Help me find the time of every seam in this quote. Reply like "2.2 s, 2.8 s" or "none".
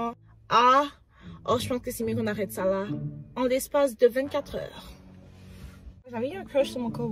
6.1 s

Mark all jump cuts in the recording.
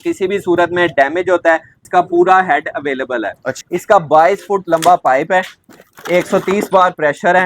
1.9 s, 3.5 s

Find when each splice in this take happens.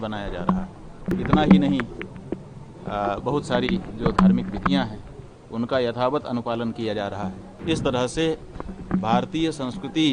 1.1 s, 7.5 s

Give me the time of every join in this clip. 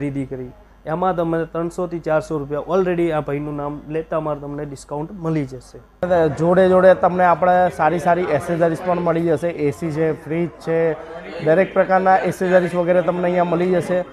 6.0 s

